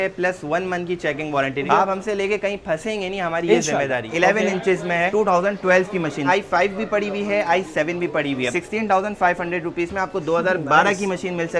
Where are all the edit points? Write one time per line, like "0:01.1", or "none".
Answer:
0:01.7
0:04.1
0:06.3
0:08.5

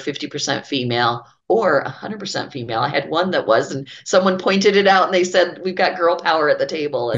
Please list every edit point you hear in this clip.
0:01.3

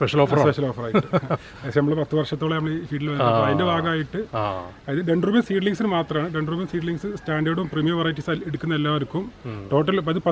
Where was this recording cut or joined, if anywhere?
none

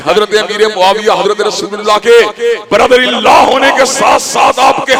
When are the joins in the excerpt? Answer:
none

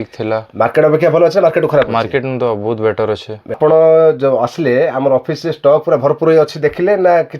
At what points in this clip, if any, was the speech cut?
0:03.6

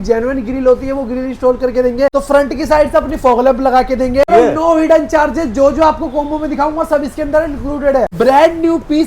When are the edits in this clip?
0:02.1
0:04.3
0:08.1

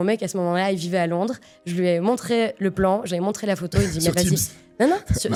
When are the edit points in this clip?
none

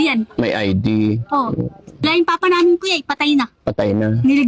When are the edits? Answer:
0:02.0

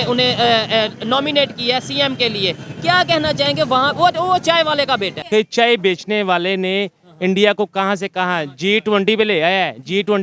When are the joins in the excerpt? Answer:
0:05.3

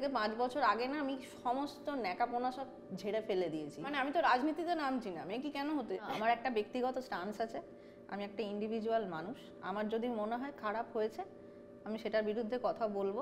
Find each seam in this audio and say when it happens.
0:03.9
0:06.1

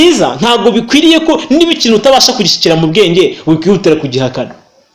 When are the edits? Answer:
none

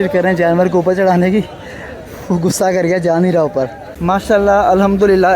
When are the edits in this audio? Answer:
0:03.8

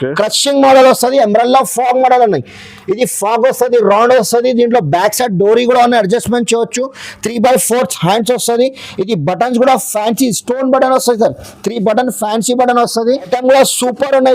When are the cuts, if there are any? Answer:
0:13.3

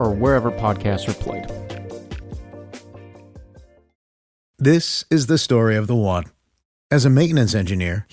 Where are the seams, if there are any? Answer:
0:03.8

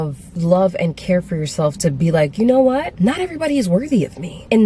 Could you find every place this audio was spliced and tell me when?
none

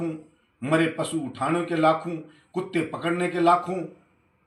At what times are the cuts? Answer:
none

